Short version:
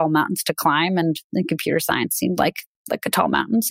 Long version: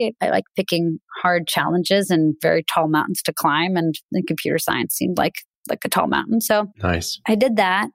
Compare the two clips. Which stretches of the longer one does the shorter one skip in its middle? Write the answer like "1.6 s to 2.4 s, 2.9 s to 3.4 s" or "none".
none